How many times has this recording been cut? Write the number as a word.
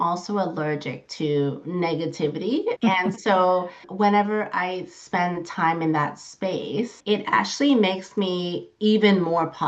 three